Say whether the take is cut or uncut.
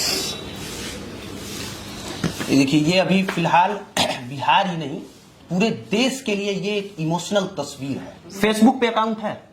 cut